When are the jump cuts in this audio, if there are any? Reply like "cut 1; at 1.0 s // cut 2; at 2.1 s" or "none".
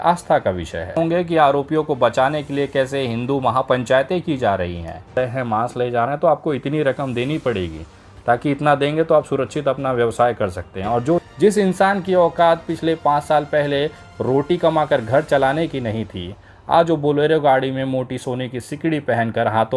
cut 1; at 0.9 s // cut 2; at 5.2 s // cut 3; at 11.2 s